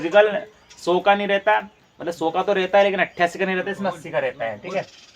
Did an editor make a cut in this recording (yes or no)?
no